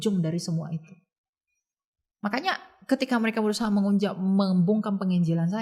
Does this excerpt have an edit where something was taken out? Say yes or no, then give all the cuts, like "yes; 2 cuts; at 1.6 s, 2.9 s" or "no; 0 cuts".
no; 0 cuts